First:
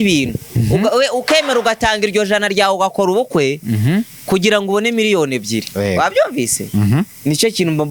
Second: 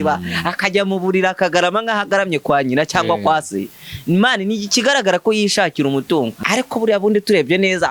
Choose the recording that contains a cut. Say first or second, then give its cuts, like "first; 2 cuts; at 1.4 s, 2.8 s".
second; 1 cut; at 6.4 s